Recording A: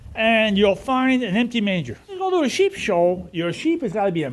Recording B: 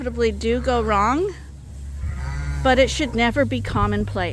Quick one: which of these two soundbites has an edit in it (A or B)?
A